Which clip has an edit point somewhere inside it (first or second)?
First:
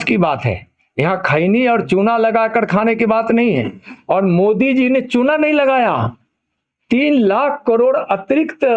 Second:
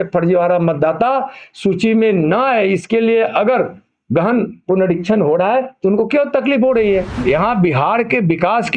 second